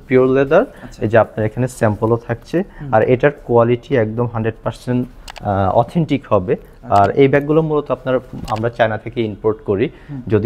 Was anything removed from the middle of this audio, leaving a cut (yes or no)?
no